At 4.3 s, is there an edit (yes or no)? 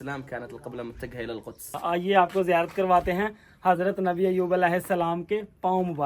no